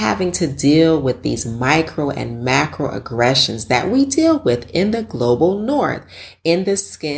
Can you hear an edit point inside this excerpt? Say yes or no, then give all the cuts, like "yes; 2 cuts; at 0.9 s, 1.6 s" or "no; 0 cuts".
no; 0 cuts